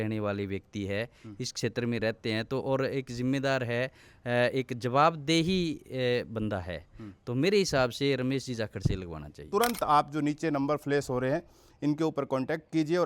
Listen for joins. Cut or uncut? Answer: uncut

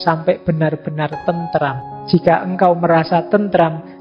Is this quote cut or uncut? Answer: cut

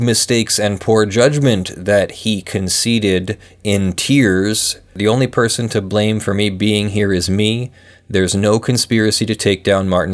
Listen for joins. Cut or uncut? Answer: cut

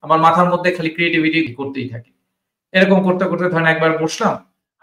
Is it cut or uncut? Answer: cut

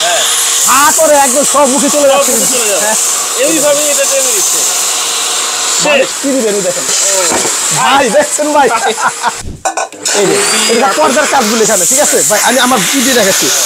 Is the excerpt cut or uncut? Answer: cut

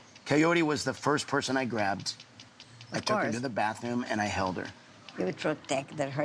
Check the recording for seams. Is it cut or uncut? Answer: uncut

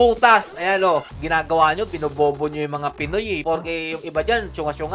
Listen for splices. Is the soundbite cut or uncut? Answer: cut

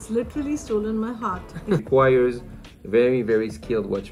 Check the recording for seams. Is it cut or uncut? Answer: cut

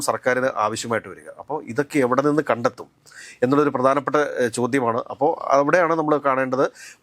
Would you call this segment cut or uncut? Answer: uncut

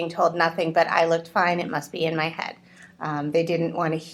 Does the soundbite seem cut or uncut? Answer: uncut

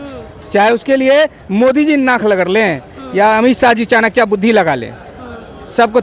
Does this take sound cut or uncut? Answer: uncut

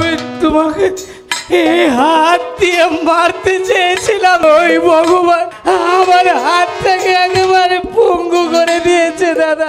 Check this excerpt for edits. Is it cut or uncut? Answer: cut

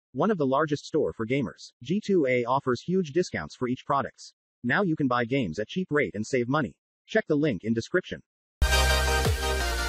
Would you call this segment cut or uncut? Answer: cut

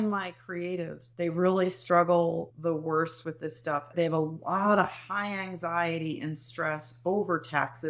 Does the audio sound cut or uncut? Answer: cut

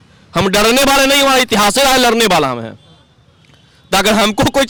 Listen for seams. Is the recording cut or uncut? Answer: uncut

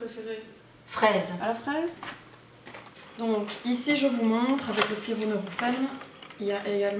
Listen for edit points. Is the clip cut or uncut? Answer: uncut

